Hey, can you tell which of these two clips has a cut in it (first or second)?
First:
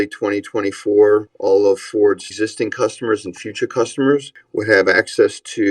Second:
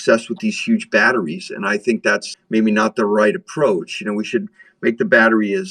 first